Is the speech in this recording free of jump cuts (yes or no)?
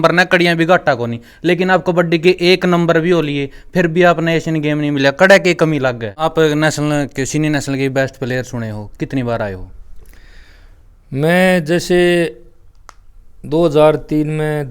no